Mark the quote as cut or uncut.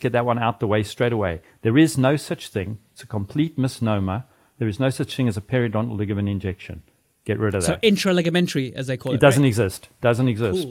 uncut